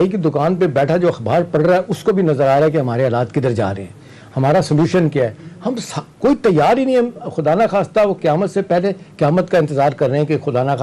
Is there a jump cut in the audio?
no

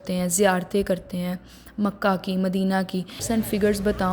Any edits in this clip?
yes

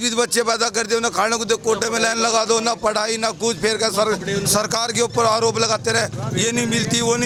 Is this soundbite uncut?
yes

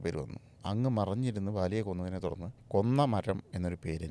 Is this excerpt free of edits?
no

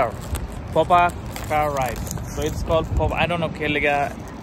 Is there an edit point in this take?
no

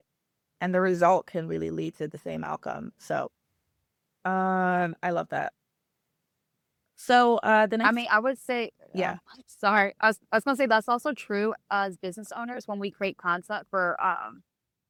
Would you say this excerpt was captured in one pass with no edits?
yes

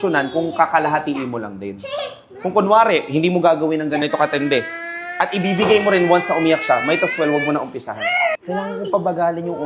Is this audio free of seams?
no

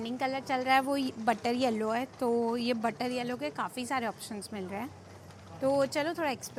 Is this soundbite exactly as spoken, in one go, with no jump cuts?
yes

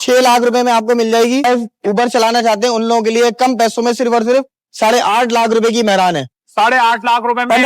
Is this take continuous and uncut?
no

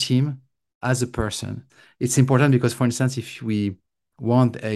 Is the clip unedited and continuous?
no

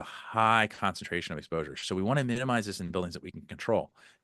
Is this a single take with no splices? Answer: yes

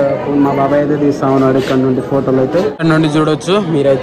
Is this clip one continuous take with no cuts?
no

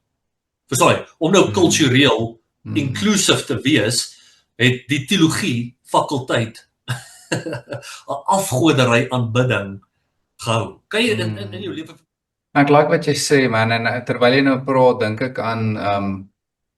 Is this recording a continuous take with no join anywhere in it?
no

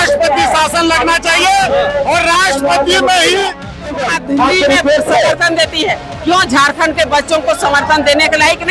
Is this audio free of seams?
no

